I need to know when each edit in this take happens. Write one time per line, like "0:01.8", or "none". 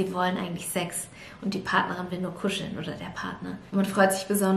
0:03.6